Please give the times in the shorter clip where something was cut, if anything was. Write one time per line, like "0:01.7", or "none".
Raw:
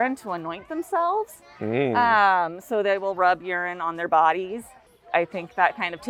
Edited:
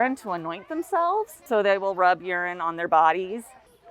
0:01.4

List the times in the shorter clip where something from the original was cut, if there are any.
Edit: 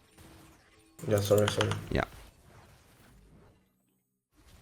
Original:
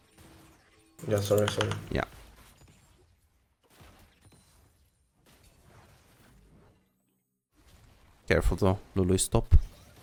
0:02.3

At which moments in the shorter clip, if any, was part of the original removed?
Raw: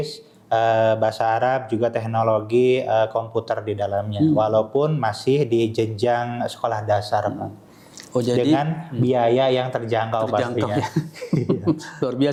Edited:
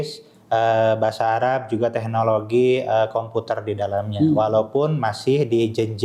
none

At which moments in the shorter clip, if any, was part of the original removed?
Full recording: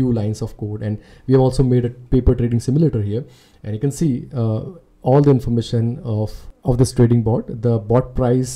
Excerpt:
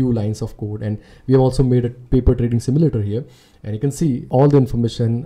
0:04.2

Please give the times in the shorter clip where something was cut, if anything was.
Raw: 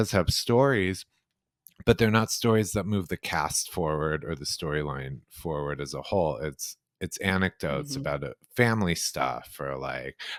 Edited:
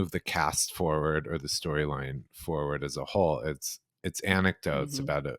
none

